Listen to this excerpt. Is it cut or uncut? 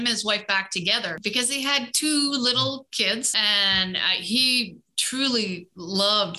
cut